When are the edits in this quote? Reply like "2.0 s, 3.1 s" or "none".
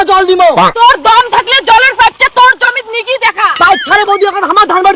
3.5 s